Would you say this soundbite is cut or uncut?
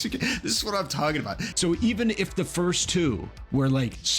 cut